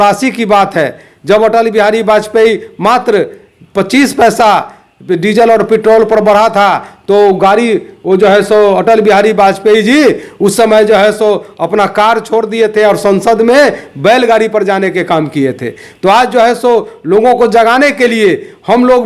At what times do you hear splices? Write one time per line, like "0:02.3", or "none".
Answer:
none